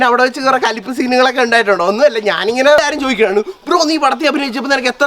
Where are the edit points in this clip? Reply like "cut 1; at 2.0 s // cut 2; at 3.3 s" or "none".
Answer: cut 1; at 2.8 s